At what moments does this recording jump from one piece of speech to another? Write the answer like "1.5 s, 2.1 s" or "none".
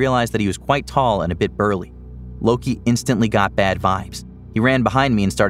none